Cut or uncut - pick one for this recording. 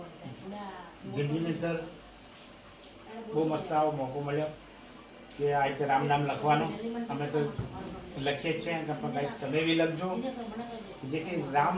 uncut